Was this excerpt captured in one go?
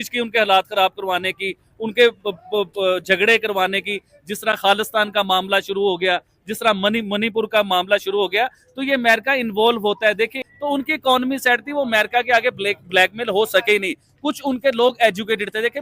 no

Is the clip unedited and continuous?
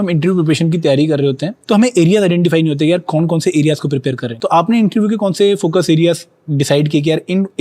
no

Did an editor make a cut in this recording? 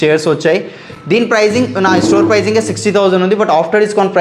no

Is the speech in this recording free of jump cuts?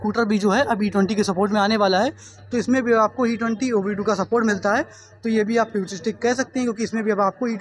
yes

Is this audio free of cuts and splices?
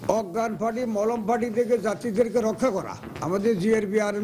yes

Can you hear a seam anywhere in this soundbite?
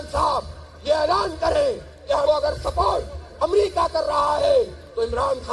yes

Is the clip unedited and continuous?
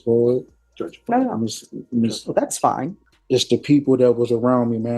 no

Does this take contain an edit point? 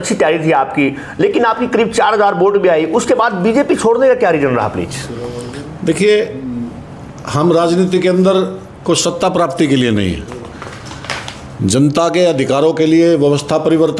no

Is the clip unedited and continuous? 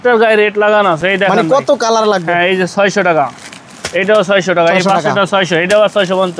yes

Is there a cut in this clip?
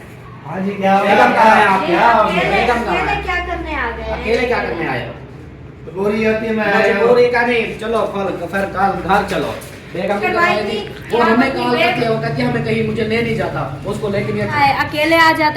yes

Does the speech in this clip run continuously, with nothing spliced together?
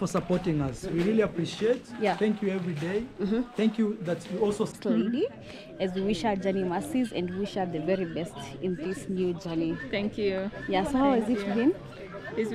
no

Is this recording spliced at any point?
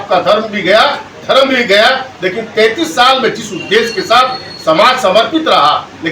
no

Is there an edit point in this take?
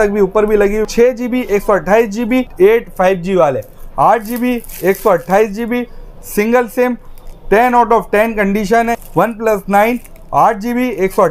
yes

